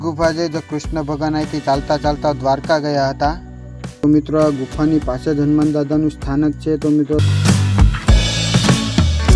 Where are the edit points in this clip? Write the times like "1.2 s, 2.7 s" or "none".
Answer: 4.0 s, 7.2 s

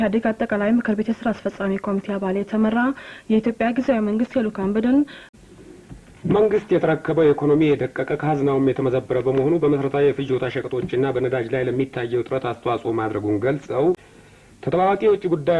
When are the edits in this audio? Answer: 5.3 s, 13.9 s

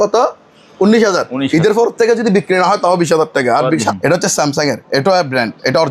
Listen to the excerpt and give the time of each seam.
3.9 s

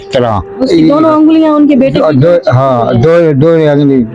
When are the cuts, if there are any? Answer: none

